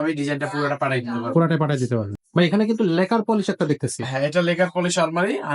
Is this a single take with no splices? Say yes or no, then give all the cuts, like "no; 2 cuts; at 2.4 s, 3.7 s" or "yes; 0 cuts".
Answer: no; 1 cut; at 2.1 s